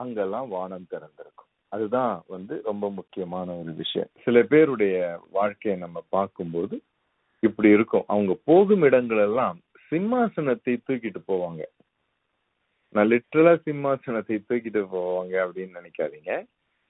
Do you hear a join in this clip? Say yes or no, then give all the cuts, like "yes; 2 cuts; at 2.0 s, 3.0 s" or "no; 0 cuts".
yes; 1 cut; at 4.1 s